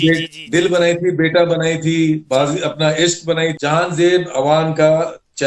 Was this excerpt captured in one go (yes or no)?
no